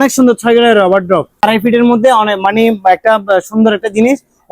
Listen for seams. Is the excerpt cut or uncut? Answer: cut